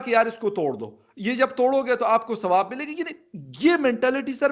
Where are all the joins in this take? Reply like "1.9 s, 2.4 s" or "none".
none